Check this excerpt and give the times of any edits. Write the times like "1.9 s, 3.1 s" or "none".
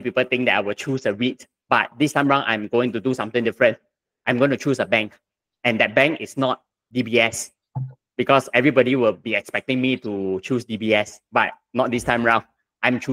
none